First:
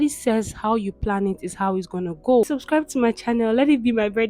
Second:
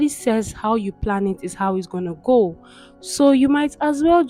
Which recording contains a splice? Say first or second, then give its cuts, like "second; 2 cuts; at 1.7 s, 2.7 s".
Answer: first; 1 cut; at 2.5 s